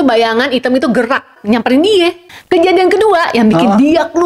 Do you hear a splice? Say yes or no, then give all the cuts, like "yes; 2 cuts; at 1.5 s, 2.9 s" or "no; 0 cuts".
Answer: yes; 2 cuts; at 1.3 s, 2.2 s